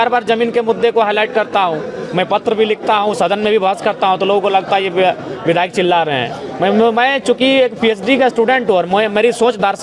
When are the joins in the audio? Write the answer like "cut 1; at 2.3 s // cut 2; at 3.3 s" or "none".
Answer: none